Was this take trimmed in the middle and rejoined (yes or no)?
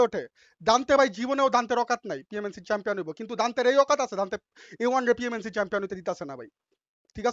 no